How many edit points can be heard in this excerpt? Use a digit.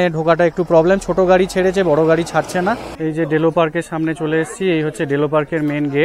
1